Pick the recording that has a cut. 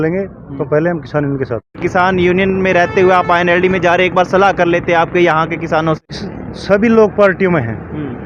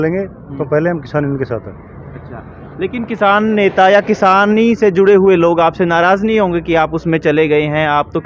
first; 2 cuts; at 1.8 s, 6.1 s

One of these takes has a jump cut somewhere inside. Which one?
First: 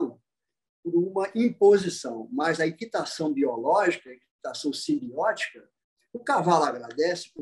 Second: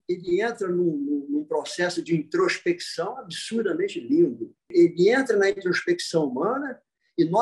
second; 1 cut; at 4.7 s

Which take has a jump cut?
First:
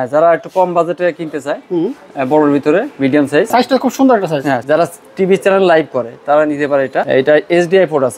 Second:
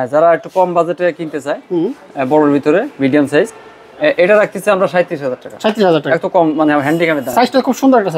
first; 3 cuts; at 3.5 s, 4.6 s, 7.1 s

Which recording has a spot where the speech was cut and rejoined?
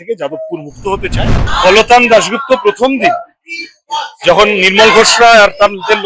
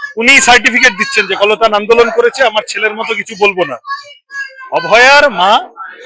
first; 1 cut; at 1.5 s

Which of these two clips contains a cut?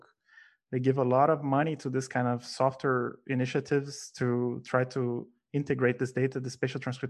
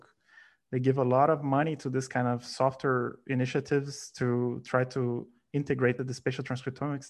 second; 1 cut; at 6.0 s

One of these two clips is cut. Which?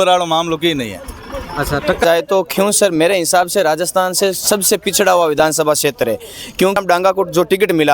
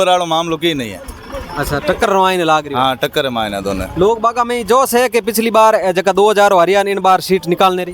first; 2 cuts; at 2.0 s, 6.8 s

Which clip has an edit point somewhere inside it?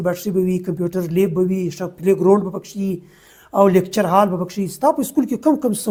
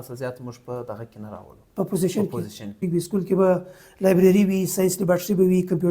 second; 1 cut; at 2.8 s

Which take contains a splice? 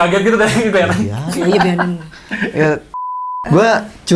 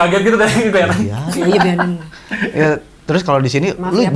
first; 1 cut; at 2.9 s

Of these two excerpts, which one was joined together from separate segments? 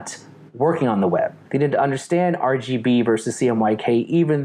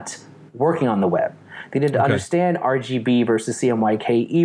first; 1 cut; at 1.4 s

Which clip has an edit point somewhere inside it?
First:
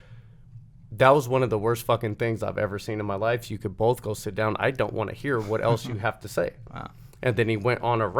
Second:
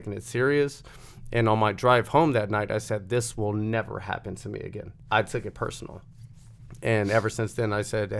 second; 1 cut; at 4.9 s

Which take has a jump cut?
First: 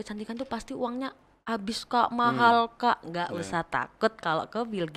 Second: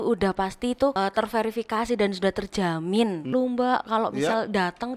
second; 2 cuts; at 0.9 s, 3.3 s

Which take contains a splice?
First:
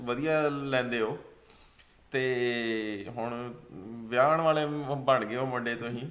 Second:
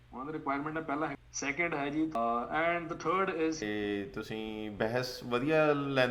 second; 3 cuts; at 1.1 s, 2.2 s, 3.6 s

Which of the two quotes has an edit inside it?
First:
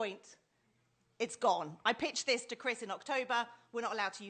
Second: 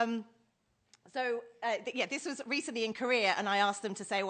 second; 1 cut; at 1.5 s

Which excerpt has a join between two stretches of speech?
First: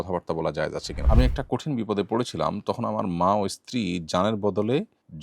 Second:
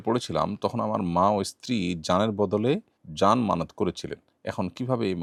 first; 1 cut; at 0.9 s

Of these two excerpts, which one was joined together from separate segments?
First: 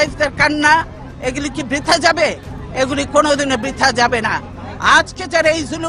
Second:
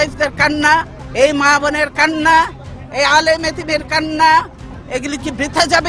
second; 2 cuts; at 1.0 s, 4.7 s

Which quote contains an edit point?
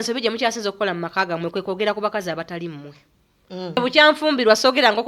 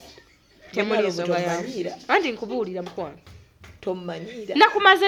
first; 1 cut; at 3.8 s

